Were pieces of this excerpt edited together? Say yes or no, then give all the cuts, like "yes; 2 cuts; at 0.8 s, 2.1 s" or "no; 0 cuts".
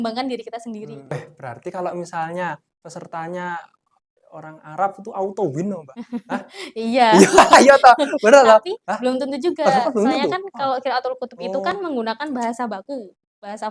yes; 1 cut; at 1.1 s